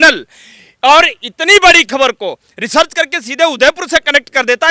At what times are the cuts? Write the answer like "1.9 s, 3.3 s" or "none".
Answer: none